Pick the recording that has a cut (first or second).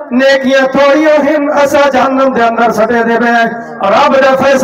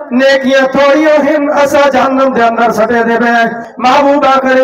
second